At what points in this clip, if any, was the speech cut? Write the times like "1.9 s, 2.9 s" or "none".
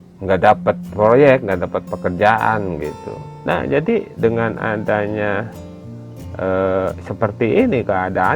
3.4 s

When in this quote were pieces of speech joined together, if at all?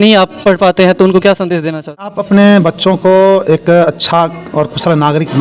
2.1 s

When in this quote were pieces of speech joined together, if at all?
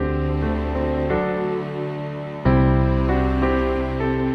none

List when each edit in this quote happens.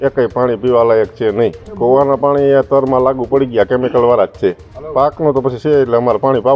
1.6 s, 4.7 s

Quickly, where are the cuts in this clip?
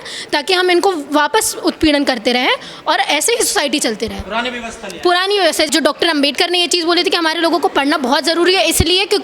5.7 s

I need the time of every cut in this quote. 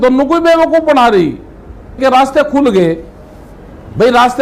2.0 s

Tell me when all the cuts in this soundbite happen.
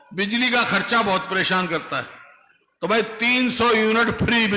none

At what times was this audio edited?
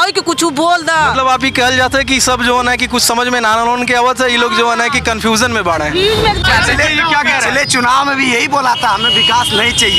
6.4 s

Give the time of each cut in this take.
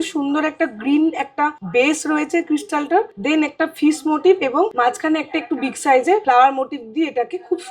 1.6 s, 3.1 s, 4.7 s, 6.2 s

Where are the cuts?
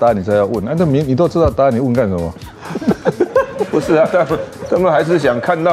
none

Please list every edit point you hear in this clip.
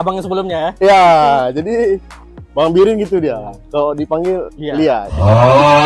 none

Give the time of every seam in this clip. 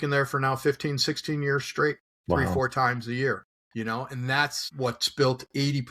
2.5 s, 3.5 s, 4.6 s

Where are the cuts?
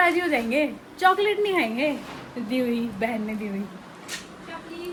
none

